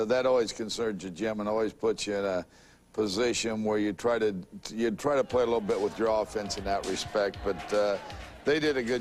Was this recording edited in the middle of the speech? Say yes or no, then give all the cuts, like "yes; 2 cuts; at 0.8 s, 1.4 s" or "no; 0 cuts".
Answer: yes; 1 cut; at 2.8 s